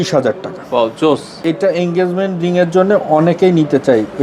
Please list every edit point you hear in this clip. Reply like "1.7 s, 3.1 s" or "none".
1.4 s